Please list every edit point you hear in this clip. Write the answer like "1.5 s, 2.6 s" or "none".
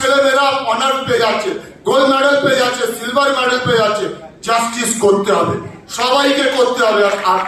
none